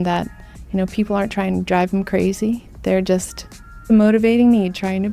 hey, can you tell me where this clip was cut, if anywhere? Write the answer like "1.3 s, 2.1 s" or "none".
3.9 s